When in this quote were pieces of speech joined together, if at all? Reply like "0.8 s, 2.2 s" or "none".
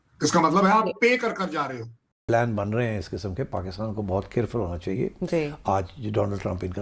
2.2 s